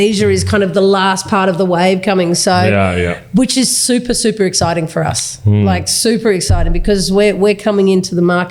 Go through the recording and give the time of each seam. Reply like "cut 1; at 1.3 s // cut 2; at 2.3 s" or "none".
none